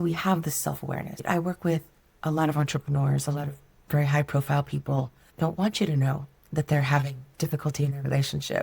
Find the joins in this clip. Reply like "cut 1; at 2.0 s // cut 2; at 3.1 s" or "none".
cut 1; at 1.1 s // cut 2; at 5.2 s